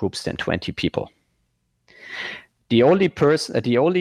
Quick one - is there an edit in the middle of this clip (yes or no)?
no